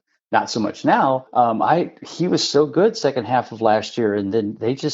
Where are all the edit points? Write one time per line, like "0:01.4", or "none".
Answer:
0:01.3

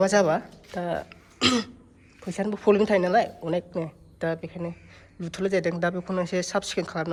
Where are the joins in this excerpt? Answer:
none

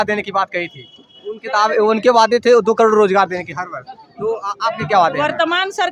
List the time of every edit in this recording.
none

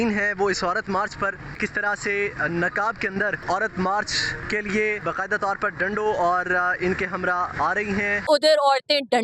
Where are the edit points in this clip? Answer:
0:01.6
0:03.4
0:04.3
0:05.0
0:07.9

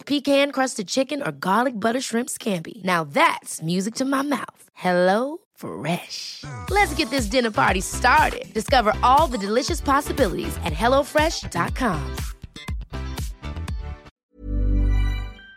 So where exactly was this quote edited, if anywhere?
0:14.2

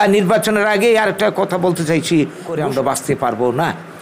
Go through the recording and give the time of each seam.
0:02.5

